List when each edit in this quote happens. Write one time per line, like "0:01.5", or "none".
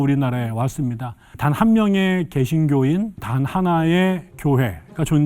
0:01.2
0:03.3
0:04.3